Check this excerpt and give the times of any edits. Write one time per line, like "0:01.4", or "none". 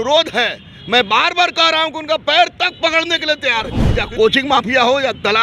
0:03.9